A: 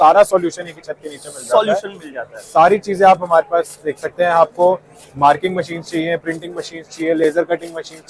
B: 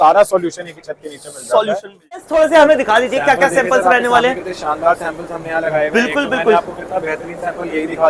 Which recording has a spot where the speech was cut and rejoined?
B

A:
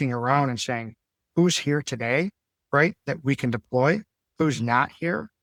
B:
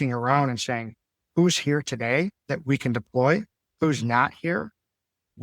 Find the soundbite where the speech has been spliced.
B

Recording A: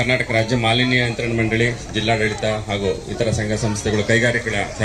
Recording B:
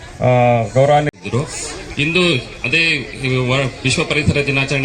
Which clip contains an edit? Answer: B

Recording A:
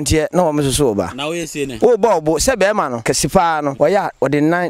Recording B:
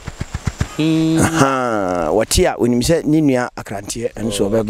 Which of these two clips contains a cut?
A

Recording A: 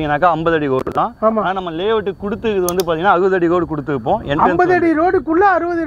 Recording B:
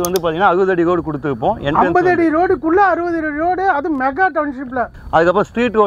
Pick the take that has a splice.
B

